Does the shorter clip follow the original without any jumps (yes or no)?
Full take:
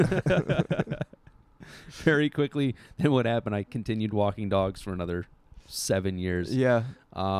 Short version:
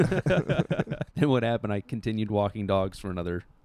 no